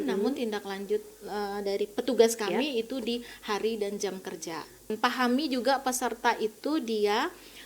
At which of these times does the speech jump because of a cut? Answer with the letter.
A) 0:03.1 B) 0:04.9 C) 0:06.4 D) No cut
B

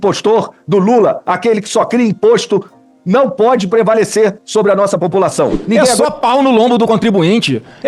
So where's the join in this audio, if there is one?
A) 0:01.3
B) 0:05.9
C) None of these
B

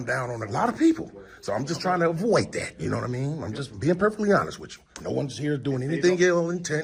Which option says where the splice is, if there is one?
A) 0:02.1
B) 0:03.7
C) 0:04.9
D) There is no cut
D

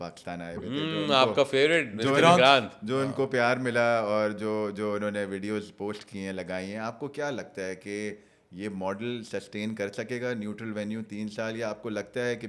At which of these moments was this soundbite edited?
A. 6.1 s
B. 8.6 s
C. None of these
C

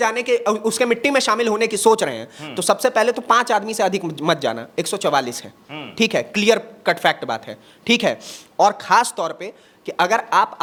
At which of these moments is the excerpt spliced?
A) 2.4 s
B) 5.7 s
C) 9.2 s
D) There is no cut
D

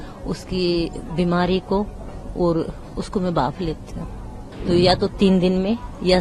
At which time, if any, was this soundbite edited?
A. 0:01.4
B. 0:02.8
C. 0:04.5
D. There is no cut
C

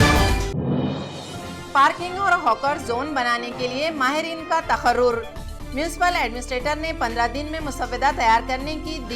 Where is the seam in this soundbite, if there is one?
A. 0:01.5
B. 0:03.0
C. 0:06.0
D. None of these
A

